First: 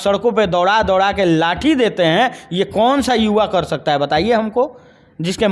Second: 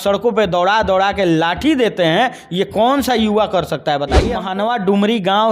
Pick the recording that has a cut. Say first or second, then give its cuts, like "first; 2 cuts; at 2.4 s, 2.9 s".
second; 1 cut; at 4.4 s